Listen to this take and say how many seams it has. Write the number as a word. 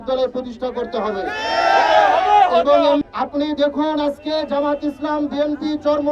one